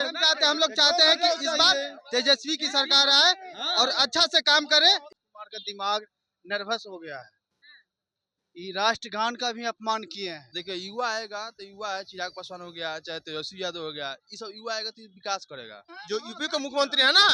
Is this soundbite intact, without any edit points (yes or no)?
no